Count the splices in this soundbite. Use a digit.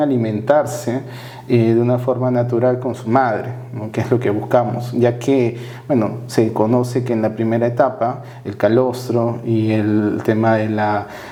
0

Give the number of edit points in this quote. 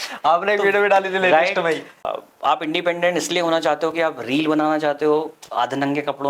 1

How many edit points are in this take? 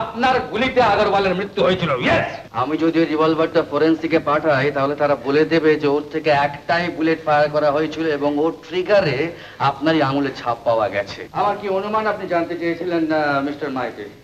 2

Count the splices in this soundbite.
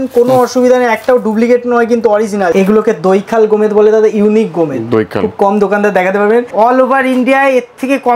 2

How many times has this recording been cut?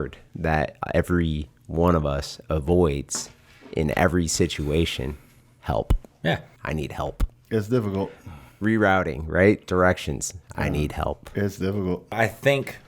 2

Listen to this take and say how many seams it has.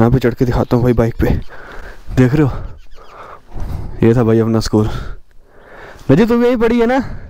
0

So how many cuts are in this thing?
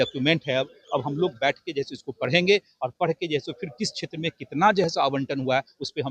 0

